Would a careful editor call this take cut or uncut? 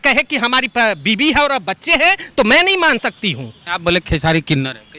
cut